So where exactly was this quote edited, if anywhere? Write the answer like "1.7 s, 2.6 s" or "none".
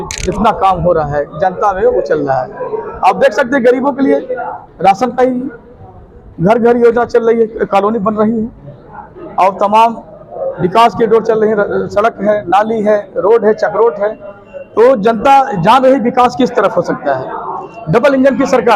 none